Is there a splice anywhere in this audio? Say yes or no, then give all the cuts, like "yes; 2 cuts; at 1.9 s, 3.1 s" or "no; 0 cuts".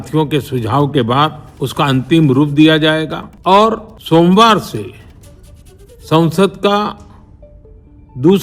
yes; 3 cuts; at 1.5 s, 3.2 s, 3.9 s